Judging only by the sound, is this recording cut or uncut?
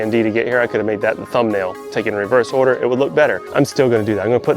cut